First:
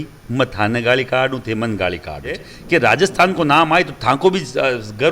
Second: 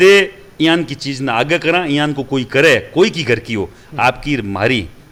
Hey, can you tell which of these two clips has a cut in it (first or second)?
first